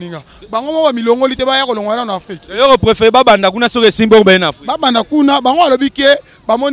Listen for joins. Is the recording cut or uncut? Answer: uncut